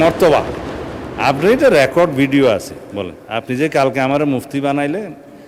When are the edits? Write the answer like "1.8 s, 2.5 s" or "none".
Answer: none